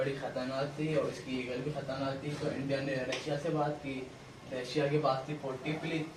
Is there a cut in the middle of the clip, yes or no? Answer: no